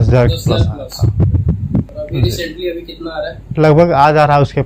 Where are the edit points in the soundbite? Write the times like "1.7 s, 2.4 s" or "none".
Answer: 1.9 s, 3.4 s